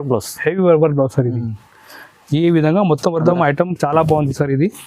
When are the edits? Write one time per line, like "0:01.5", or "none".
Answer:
0:03.2

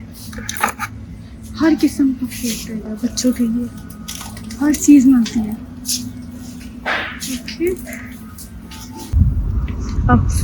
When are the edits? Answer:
0:09.1

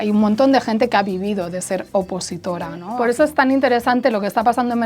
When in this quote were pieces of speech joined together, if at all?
0:02.9

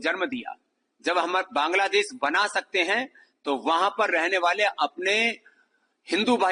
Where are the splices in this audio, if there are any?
none

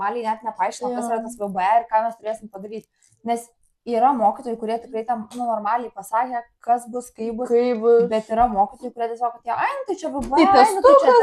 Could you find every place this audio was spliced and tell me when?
none

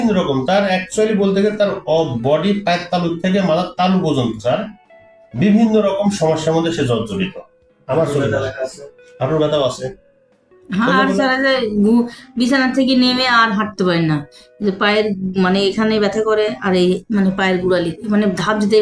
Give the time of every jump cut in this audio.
none

